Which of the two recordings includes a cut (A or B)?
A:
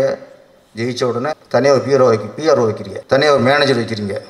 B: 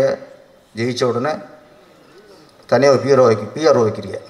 A